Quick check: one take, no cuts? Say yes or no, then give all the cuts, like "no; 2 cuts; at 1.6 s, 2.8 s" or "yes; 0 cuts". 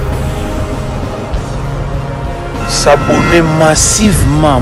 yes; 0 cuts